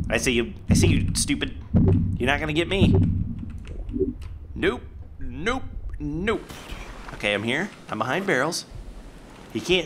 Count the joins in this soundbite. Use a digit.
0